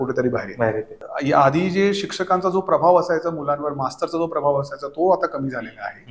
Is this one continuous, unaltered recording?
no; 1 cut; at 1.0 s

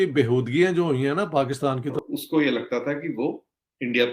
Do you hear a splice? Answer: yes; 1 cut; at 2.0 s

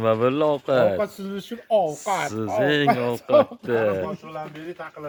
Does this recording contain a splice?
no; 0 cuts

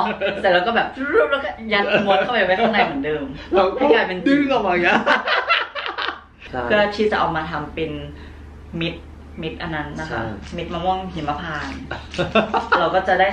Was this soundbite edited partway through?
yes; 1 cut; at 6.3 s

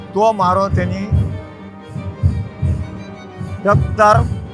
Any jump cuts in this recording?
no; 0 cuts

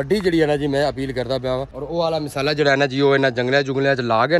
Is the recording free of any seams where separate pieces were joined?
no; 1 cut; at 1.7 s

